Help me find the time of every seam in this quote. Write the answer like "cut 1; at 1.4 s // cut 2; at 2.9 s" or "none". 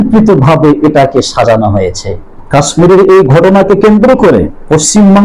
cut 1; at 4.3 s